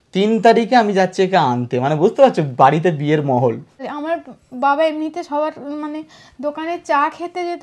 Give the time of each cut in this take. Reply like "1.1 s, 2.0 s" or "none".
3.9 s

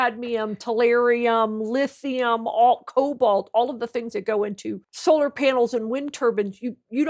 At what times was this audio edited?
4.9 s

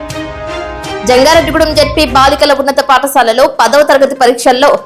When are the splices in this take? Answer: none

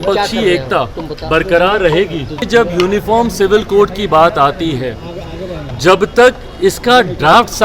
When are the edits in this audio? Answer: 2.5 s

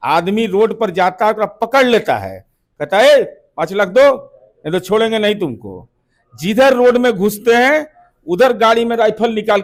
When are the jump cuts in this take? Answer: none

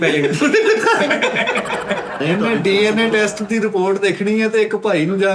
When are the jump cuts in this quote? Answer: 2.2 s

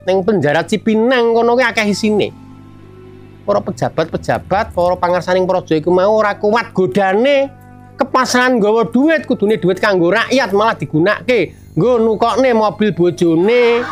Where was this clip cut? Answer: none

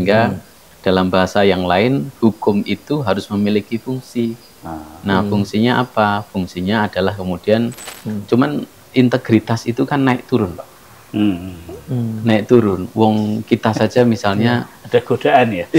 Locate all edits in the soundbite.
7.9 s

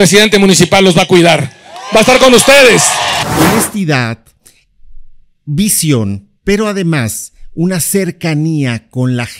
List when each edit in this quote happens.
3.2 s

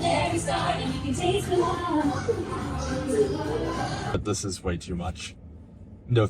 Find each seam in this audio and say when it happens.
4.1 s

